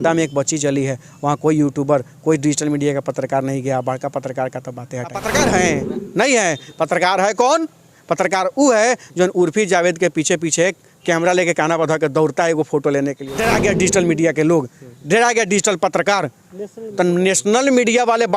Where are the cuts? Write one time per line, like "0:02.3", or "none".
0:05.2
0:13.3